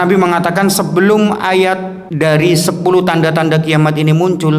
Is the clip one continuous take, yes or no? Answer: no